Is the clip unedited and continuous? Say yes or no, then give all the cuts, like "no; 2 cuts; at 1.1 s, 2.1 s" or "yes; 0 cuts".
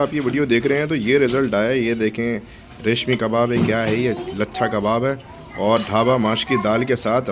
yes; 0 cuts